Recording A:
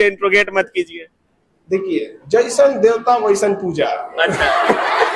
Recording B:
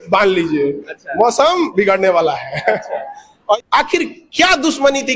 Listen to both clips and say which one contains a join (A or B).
B